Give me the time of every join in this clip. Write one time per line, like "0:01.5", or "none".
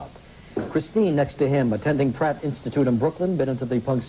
0:03.0